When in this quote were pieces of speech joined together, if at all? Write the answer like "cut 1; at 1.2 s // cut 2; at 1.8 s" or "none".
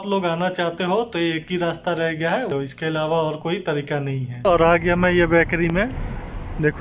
cut 1; at 2.5 s // cut 2; at 4.4 s